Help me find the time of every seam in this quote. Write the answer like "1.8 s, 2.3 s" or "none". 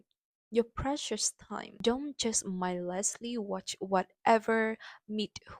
1.7 s